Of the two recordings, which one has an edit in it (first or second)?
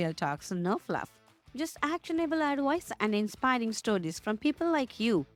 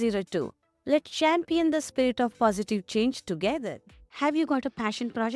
second